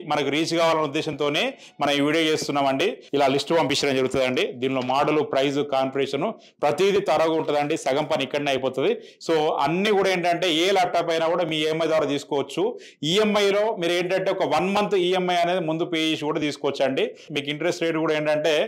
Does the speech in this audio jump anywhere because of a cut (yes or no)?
yes